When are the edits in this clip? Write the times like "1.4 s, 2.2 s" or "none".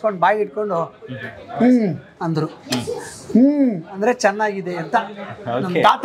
none